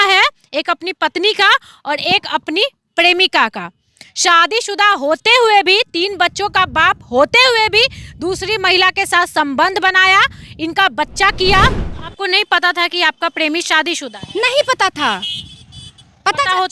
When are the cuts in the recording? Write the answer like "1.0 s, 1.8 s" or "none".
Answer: 11.9 s